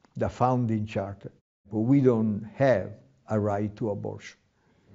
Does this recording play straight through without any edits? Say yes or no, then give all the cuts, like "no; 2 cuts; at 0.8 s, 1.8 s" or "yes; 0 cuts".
no; 1 cut; at 1.7 s